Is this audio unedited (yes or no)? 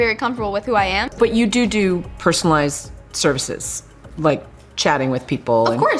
no